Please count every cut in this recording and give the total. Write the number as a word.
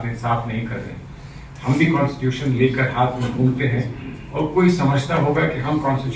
zero